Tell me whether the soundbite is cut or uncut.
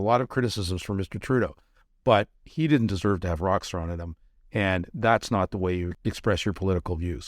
cut